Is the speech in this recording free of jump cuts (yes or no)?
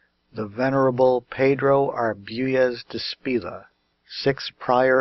no